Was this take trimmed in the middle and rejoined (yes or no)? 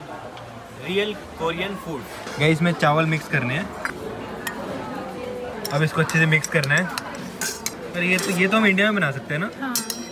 no